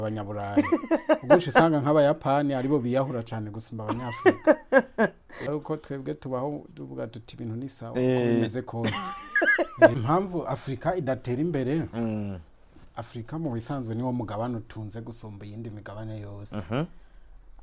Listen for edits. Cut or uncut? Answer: cut